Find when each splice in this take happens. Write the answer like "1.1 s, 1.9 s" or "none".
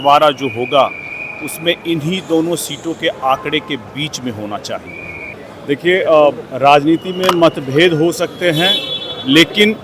5.3 s